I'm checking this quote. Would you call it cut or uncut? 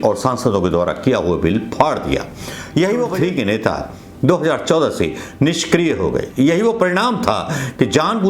cut